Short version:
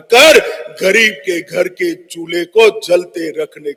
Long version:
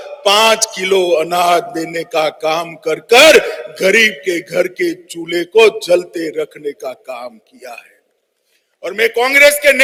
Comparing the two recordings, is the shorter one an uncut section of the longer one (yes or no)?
yes